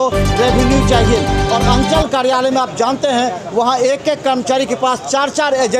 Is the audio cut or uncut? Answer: cut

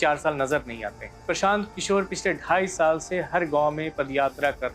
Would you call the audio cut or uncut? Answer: cut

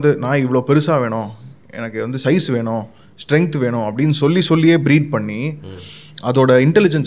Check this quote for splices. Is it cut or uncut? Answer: uncut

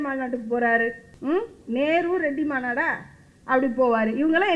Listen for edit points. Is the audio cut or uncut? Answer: cut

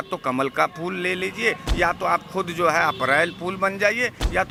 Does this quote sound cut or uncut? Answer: uncut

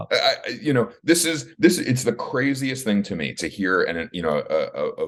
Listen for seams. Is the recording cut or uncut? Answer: uncut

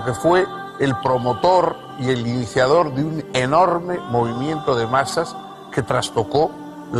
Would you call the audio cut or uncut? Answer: cut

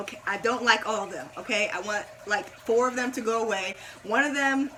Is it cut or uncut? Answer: uncut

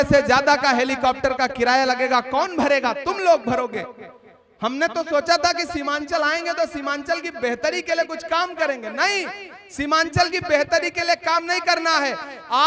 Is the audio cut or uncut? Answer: uncut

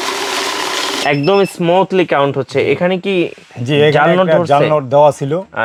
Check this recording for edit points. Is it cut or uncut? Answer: uncut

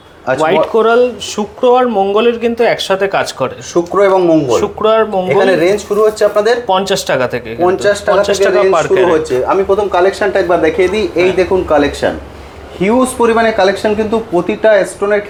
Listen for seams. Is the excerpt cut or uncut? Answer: uncut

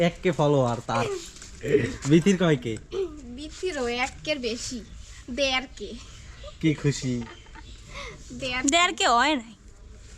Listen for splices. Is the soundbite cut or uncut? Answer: uncut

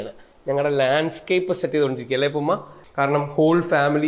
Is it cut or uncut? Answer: cut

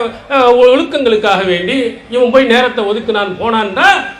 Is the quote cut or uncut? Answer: uncut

